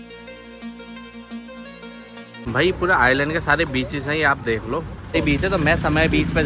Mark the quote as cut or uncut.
cut